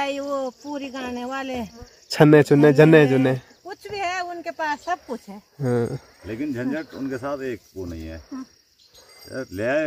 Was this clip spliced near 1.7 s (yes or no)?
no